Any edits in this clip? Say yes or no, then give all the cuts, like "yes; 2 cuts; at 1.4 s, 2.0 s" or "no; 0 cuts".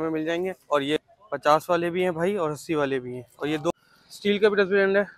yes; 2 cuts; at 1.0 s, 3.7 s